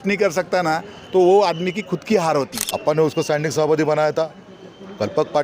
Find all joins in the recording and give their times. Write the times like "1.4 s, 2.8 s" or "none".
2.6 s